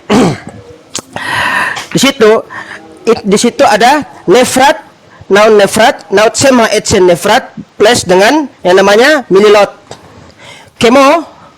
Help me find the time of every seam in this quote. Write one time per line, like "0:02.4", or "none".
0:07.6
0:08.5